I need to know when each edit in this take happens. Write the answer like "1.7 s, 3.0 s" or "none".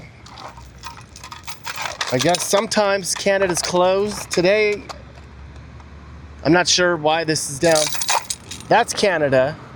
none